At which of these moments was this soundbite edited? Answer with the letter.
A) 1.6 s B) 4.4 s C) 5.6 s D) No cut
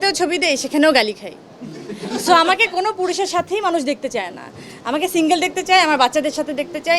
D